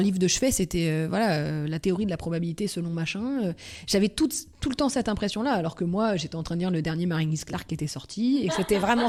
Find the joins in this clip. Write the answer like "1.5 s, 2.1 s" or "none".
none

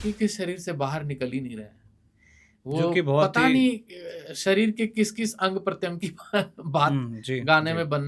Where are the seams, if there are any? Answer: none

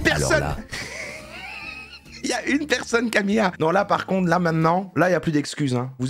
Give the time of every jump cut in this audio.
3.6 s

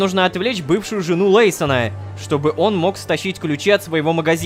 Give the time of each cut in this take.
none

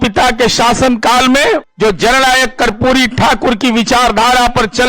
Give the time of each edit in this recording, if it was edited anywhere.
1.7 s

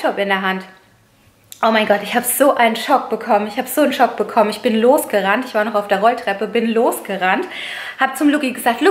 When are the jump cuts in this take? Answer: none

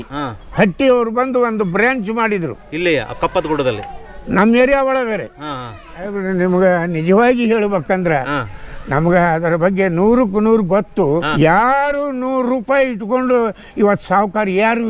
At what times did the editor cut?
6.1 s, 11.3 s

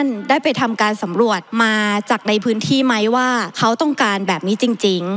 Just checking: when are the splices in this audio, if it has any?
1.4 s, 3.5 s

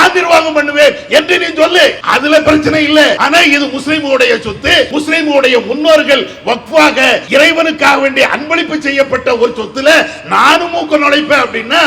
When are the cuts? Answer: 2.0 s, 3.2 s, 4.9 s, 7.2 s

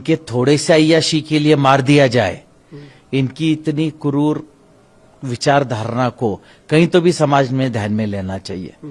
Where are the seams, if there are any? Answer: none

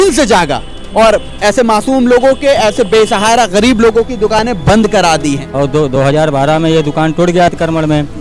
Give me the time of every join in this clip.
5.4 s

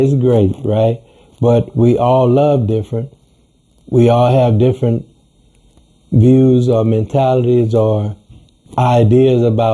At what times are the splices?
8.6 s

